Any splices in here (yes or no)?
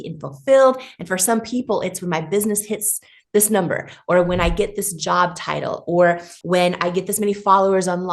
yes